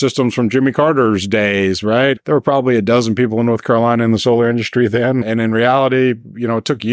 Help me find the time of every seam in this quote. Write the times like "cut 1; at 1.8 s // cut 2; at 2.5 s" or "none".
cut 1; at 2.2 s // cut 2; at 5.2 s

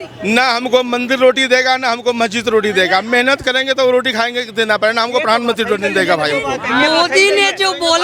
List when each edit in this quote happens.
none

